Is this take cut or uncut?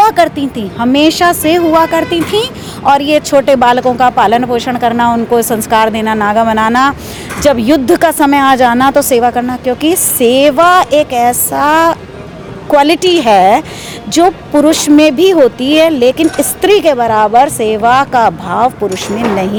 uncut